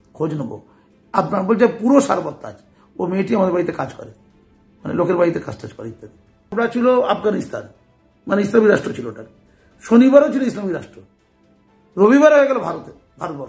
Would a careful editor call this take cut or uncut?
cut